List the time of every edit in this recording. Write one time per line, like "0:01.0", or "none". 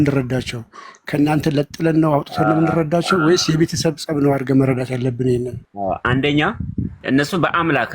0:05.6
0:07.0